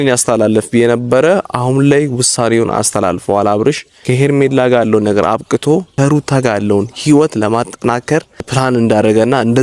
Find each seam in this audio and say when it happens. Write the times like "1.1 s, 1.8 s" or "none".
3.9 s, 5.9 s, 8.5 s